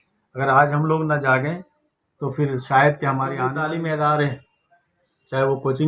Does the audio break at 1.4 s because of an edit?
no; 1 cut; at 3.5 s

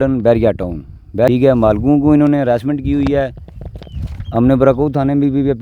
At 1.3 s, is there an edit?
yes; 1 cut; at 1.3 s

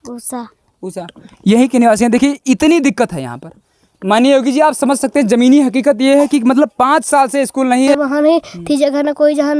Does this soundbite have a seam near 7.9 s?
yes; 1 cut; at 7.9 s

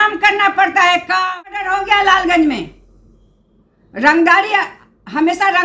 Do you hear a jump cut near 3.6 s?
no; 1 cut; at 1.7 s

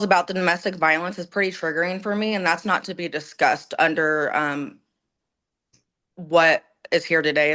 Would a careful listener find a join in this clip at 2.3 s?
no; 0 cuts

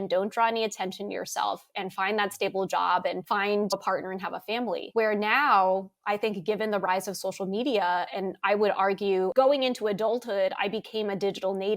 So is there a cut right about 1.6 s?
no; 1 cut; at 9.3 s

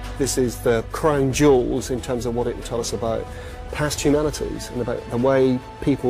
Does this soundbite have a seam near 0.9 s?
yes; 1 cut; at 0.9 s

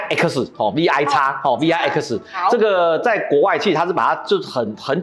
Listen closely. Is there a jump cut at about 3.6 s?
no; 0 cuts

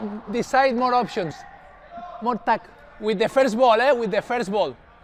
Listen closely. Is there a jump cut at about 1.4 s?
no; 0 cuts

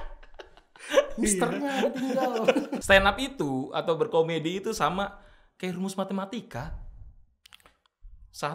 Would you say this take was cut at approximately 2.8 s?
yes; 1 cut; at 2.8 s

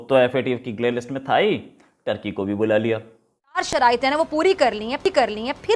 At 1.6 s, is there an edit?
no; 1 cut; at 3.6 s

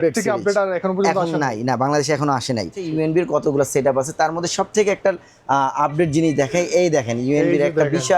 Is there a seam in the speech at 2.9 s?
yes; 1 cut; at 2.9 s

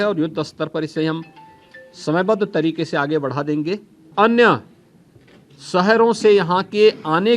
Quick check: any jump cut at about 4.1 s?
yes; 1 cut; at 4.1 s

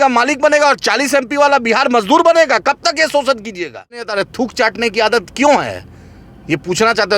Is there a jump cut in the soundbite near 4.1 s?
yes; 1 cut; at 4.1 s

